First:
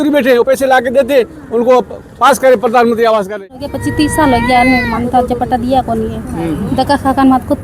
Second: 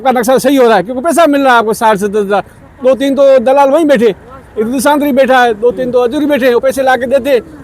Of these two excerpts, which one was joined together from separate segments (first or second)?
first